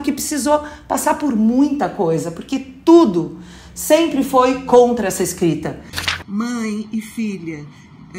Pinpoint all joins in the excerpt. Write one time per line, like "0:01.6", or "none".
0:06.1